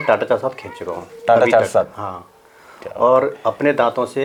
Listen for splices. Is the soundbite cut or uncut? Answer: uncut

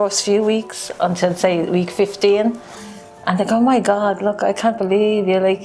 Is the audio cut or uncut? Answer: uncut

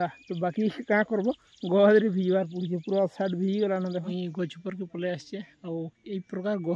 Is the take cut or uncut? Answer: cut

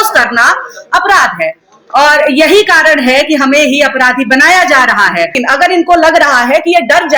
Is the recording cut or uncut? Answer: cut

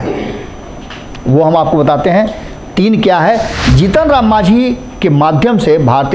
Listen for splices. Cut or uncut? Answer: cut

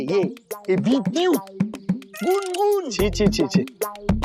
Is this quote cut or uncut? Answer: uncut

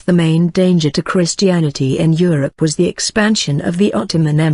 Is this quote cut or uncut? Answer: cut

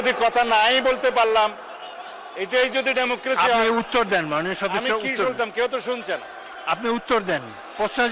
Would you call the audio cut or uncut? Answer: uncut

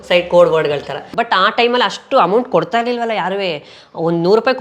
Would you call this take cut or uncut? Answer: cut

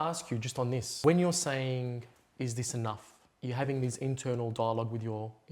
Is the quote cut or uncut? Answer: cut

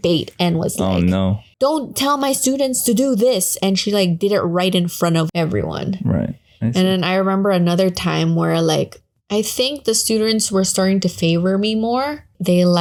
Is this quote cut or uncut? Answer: uncut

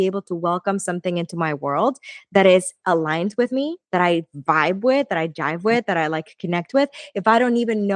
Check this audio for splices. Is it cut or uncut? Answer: uncut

